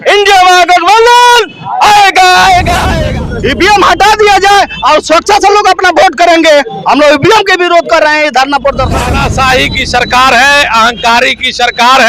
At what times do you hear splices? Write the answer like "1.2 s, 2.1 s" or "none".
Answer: 2.8 s, 9.1 s